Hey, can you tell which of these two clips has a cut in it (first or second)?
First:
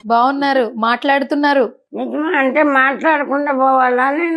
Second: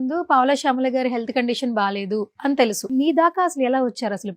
second